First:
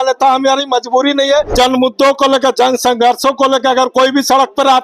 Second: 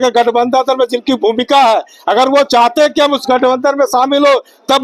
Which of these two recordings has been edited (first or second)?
first